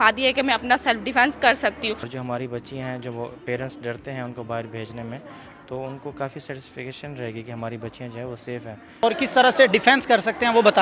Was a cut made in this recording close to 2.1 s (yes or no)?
yes